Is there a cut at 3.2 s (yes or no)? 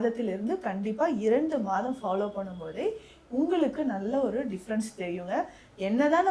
no